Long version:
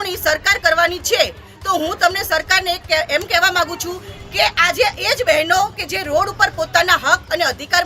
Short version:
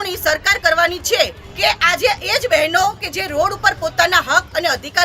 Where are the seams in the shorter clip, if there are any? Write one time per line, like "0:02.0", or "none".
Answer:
0:01.4